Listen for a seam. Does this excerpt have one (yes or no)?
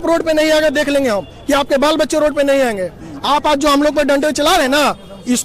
no